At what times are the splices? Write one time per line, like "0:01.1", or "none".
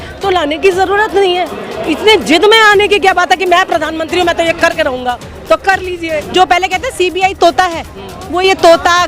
0:06.2